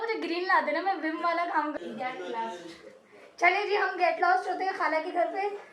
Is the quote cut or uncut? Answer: cut